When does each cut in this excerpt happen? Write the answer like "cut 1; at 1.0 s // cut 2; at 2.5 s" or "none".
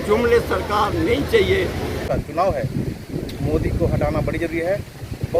cut 1; at 2.1 s

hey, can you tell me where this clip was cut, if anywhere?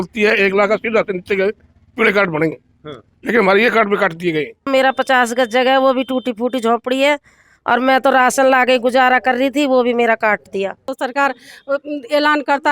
cut 1; at 4.7 s // cut 2; at 10.8 s

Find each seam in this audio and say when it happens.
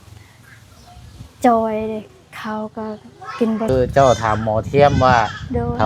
cut 1; at 3.7 s

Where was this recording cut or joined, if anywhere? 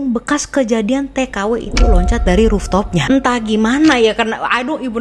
none

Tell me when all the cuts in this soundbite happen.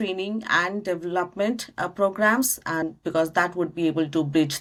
none

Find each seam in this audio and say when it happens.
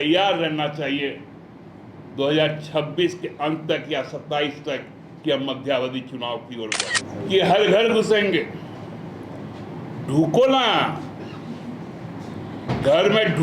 cut 1; at 7.0 s

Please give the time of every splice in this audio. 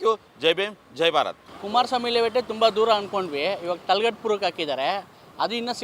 none

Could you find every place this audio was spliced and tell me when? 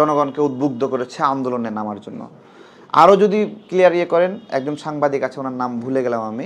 none

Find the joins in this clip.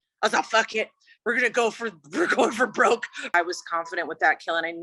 cut 1; at 3.3 s

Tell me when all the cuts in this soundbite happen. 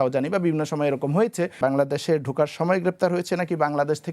cut 1; at 1.5 s

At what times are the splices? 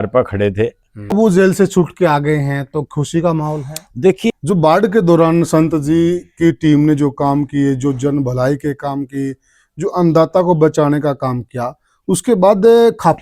cut 1; at 1.1 s // cut 2; at 4.3 s

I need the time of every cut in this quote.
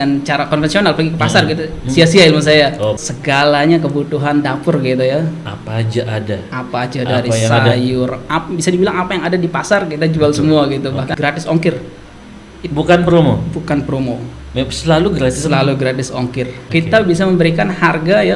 cut 1; at 3.1 s // cut 2; at 11.1 s // cut 3; at 16.6 s

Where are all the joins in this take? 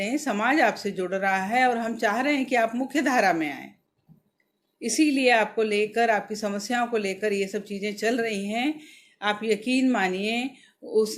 none

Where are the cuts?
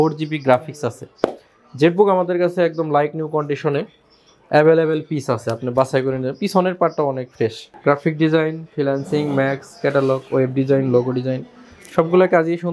cut 1; at 7.7 s

